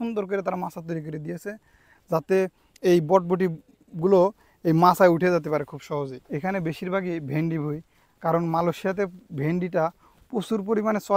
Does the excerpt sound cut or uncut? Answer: uncut